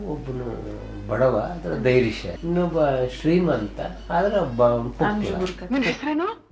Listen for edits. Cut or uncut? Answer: cut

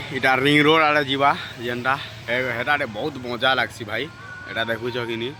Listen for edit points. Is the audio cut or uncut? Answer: uncut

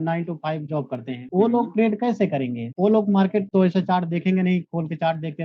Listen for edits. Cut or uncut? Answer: cut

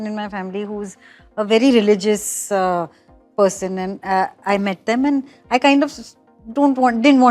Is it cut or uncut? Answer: uncut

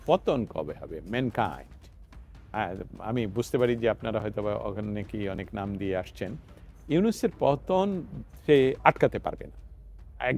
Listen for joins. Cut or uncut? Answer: uncut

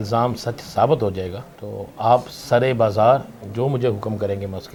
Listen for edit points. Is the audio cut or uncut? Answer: uncut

